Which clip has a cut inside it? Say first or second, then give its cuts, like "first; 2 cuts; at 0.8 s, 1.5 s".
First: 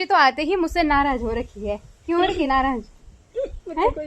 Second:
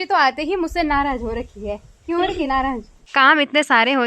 second; 1 cut; at 3.0 s